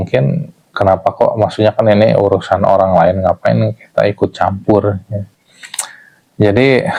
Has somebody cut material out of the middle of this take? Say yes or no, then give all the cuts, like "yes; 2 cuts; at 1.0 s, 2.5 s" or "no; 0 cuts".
no; 0 cuts